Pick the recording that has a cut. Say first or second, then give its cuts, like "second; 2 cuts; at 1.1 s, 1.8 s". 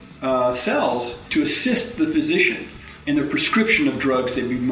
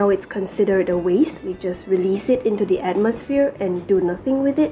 first; 1 cut; at 1.2 s